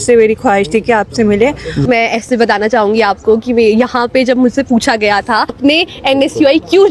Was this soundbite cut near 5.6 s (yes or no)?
yes